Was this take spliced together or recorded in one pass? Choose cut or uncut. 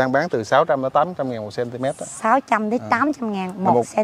uncut